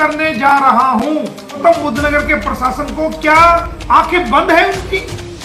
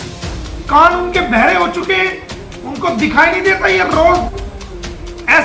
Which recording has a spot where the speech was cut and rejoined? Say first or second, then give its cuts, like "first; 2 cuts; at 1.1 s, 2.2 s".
first; 2 cuts; at 1.6 s, 3.7 s